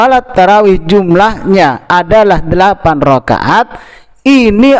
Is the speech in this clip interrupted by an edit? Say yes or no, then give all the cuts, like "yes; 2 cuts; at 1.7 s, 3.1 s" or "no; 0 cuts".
no; 0 cuts